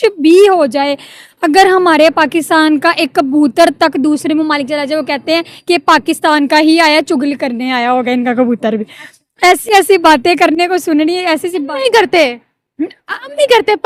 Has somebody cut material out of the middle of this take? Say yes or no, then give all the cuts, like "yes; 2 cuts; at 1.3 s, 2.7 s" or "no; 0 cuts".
no; 0 cuts